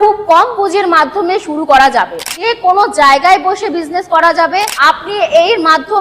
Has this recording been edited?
yes; 2 cuts; at 2.3 s, 4.7 s

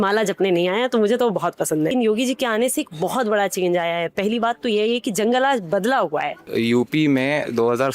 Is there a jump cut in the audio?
yes; 2 cuts; at 1.9 s, 6.5 s

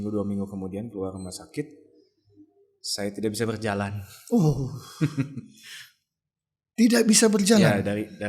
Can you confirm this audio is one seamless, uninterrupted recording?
yes; 0 cuts

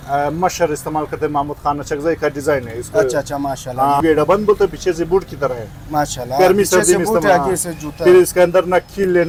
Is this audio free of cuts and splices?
yes; 0 cuts

